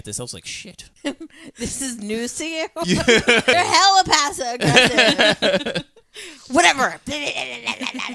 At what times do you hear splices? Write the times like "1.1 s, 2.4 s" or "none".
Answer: 0.9 s, 3.5 s